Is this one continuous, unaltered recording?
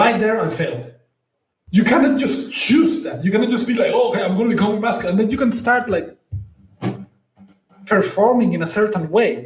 no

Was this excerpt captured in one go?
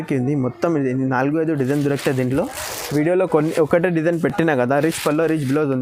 yes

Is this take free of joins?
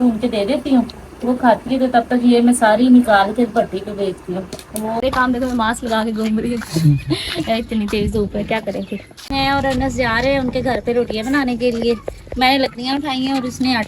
no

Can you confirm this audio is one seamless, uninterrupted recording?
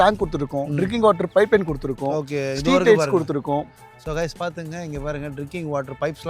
yes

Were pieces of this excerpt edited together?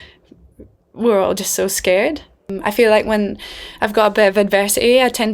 yes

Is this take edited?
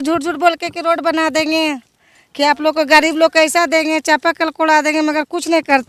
no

